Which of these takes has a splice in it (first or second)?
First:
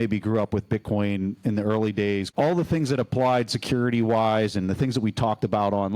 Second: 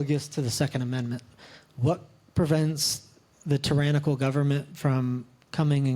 first